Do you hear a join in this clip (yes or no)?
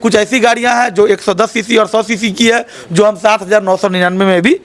no